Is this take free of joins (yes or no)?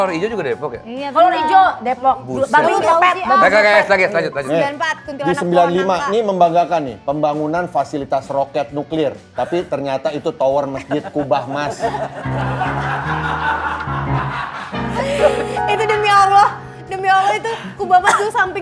yes